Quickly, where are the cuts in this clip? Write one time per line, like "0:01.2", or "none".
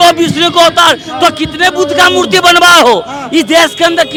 none